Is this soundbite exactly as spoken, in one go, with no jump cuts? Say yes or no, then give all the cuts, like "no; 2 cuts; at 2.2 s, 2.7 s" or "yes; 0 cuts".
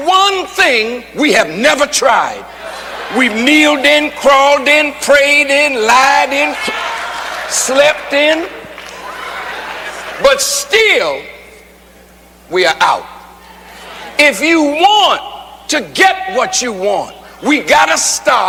yes; 0 cuts